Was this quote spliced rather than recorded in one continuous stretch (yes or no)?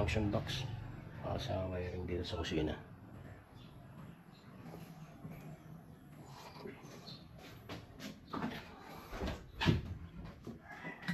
no